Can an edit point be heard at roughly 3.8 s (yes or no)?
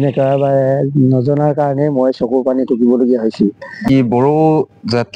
yes